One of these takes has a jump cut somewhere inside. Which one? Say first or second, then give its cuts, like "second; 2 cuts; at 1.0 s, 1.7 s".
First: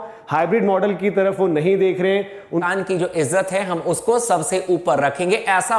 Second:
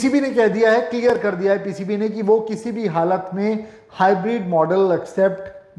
first; 1 cut; at 2.6 s